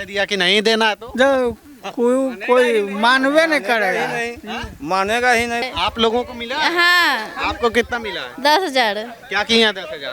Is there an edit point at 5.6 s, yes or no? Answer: yes